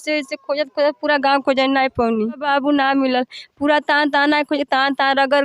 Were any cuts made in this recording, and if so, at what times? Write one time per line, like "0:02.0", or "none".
0:02.4

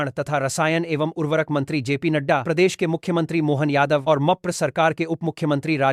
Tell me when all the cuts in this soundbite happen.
none

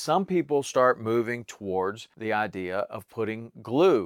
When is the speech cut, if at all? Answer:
0:02.1

